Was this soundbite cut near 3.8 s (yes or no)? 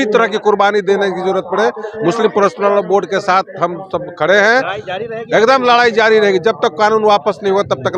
no